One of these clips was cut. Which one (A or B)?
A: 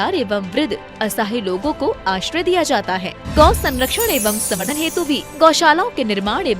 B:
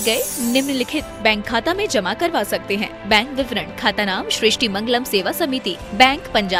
A